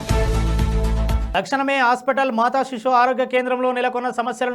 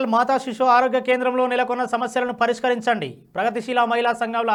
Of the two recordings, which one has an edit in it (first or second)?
first